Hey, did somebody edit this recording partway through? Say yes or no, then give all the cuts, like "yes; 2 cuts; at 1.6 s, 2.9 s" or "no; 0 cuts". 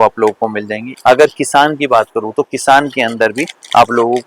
yes; 1 cut; at 0.9 s